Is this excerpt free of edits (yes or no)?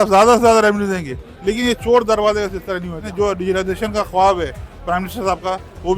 no